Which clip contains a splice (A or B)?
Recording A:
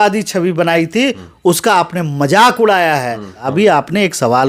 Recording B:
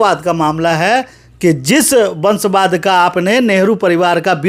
A